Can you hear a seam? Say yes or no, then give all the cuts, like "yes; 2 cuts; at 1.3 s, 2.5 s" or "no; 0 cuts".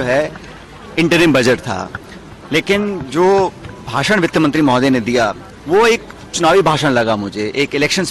no; 0 cuts